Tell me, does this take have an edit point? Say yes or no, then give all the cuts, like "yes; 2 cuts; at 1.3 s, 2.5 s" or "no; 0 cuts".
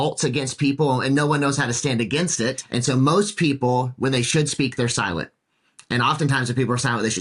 yes; 1 cut; at 2.6 s